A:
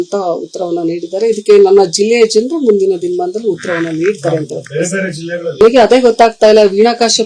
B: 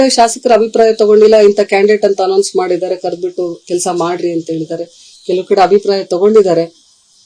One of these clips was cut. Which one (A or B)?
A